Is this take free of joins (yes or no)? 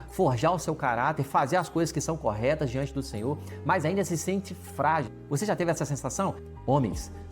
no